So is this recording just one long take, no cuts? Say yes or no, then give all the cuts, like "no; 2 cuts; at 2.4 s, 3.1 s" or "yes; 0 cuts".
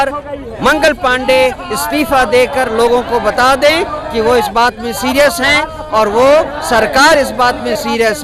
yes; 0 cuts